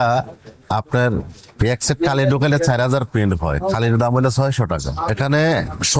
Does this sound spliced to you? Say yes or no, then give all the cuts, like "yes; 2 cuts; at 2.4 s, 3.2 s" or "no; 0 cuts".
yes; 1 cut; at 5.1 s